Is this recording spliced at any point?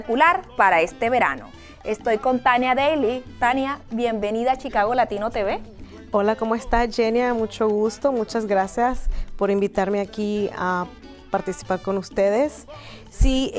yes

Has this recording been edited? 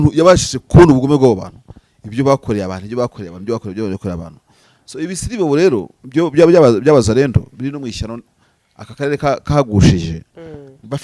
no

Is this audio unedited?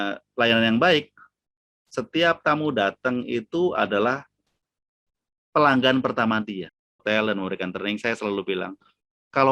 no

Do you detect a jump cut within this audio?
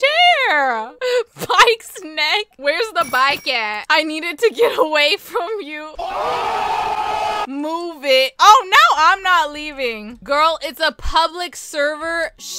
no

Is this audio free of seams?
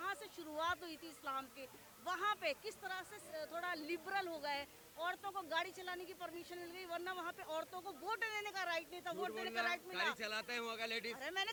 yes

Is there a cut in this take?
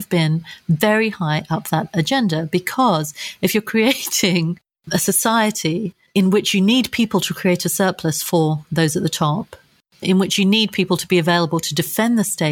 no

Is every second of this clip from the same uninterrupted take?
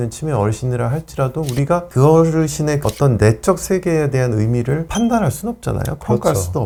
yes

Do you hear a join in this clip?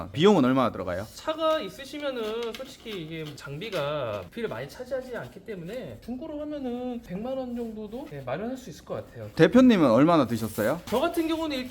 yes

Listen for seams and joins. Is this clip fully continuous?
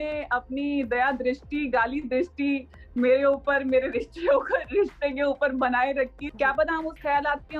no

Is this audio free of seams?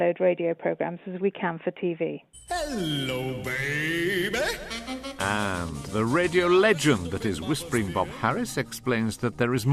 no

